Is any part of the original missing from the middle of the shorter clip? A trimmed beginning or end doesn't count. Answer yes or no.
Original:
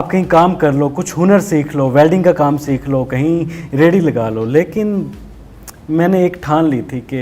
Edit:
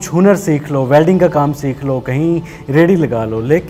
no